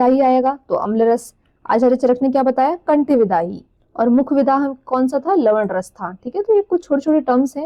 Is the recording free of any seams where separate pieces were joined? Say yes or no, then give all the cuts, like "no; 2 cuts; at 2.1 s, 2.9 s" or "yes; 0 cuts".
yes; 0 cuts